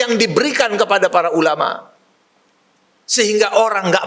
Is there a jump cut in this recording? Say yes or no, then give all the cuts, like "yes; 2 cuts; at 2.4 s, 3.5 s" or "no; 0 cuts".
no; 0 cuts